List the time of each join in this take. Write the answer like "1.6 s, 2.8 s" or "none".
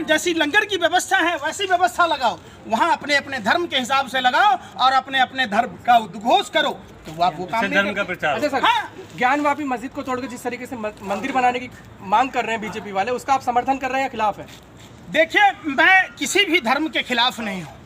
none